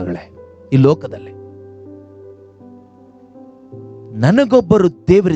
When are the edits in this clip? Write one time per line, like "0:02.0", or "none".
none